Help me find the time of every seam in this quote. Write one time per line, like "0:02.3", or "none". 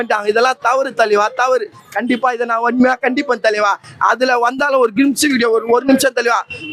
none